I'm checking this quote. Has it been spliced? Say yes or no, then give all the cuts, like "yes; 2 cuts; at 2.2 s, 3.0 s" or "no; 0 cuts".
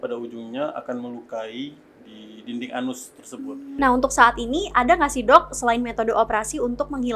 yes; 1 cut; at 3.6 s